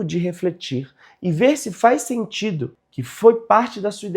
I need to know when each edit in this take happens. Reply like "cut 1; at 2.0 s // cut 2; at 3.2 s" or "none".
cut 1; at 2.7 s